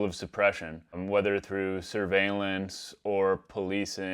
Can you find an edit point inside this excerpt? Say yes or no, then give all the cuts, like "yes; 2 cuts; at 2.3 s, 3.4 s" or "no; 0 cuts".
yes; 1 cut; at 1.0 s